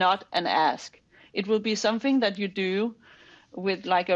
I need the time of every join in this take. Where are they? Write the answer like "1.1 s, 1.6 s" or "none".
none

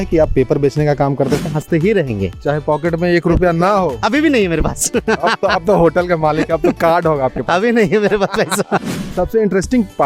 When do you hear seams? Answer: 1.5 s, 9.0 s

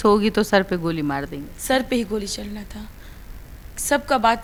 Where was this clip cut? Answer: none

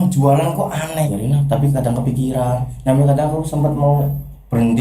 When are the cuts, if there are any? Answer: 1.1 s

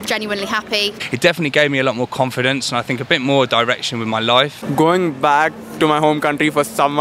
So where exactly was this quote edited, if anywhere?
1.0 s, 4.6 s

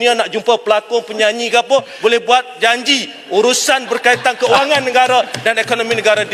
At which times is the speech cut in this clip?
none

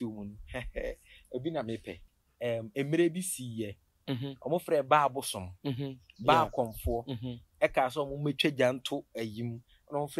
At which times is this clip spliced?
2.1 s

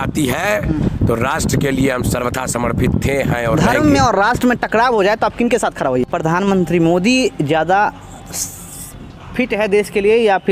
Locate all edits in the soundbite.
3.6 s, 6.0 s

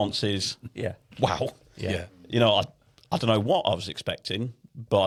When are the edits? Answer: none

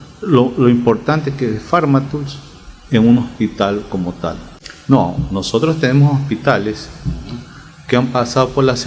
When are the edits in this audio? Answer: 4.5 s

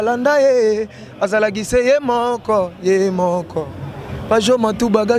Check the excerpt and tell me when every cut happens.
none

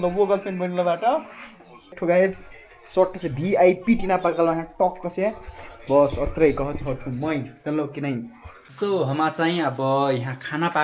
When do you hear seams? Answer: 1.9 s

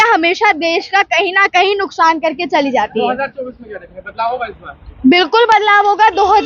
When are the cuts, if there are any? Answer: none

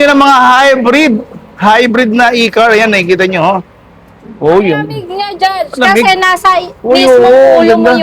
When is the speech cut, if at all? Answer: none

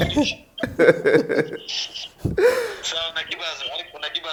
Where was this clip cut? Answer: none

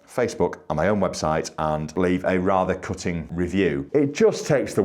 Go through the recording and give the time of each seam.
1.9 s, 3.5 s

